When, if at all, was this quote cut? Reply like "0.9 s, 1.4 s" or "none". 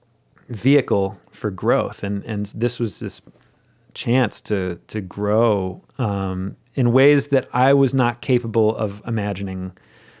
none